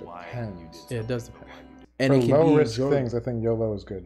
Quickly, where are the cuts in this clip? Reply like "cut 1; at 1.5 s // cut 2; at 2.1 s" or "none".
cut 1; at 1.8 s